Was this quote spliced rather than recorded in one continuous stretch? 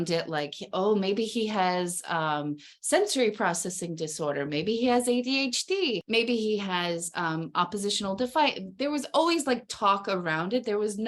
no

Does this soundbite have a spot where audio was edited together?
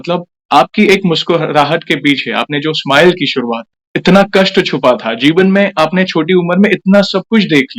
no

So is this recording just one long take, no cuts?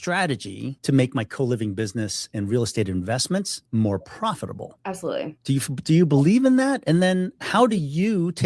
yes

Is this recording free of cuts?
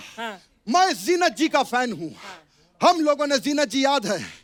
yes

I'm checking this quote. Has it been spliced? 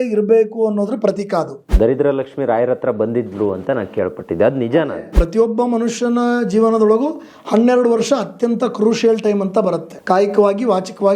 yes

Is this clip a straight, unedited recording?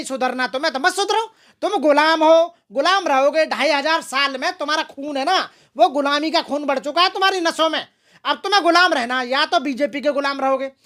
yes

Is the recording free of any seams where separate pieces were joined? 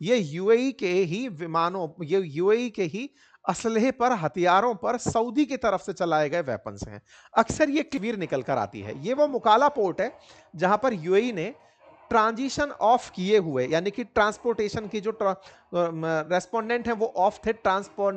no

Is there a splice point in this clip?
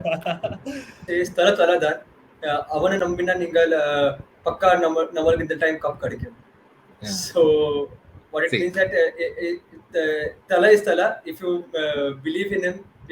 yes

